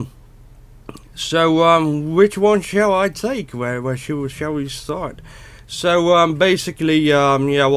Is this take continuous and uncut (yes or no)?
no